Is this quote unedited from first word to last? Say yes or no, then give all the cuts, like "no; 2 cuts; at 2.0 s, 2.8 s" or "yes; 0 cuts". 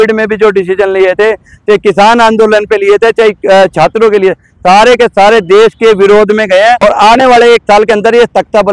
no; 1 cut; at 6.8 s